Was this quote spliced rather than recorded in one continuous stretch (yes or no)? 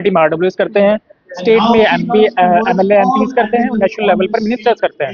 no